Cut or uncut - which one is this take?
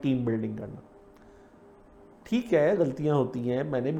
uncut